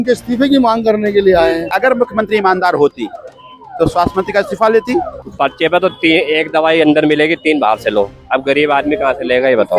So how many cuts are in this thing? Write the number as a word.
two